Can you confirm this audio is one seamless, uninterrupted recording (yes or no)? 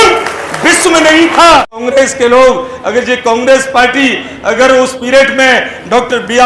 no